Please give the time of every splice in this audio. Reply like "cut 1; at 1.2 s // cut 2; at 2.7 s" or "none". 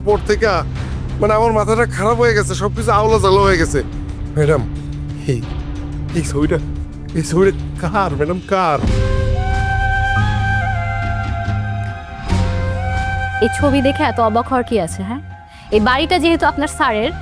none